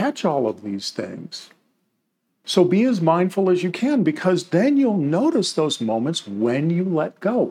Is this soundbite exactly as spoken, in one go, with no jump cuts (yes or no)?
no